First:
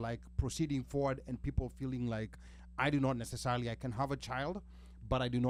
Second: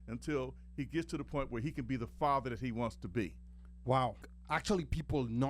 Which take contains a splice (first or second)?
second